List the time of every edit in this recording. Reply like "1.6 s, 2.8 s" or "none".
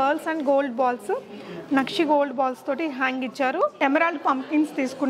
3.7 s